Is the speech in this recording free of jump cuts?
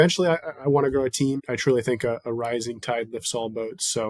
no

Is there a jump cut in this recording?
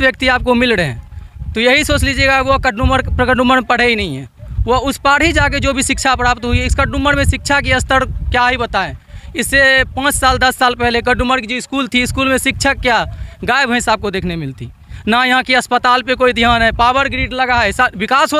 no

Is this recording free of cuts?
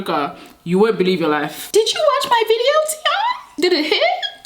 no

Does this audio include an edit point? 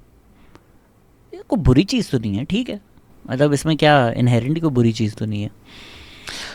no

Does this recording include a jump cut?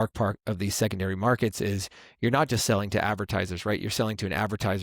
no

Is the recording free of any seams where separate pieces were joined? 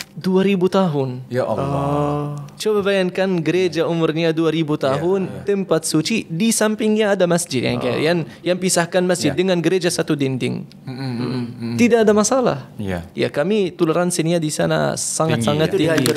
yes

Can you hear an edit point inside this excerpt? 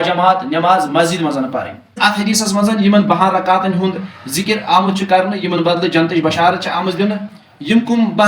yes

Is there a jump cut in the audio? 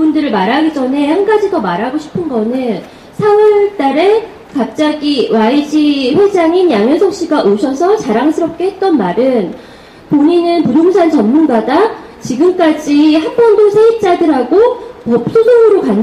no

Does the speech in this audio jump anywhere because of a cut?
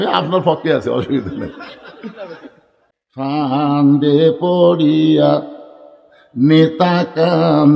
yes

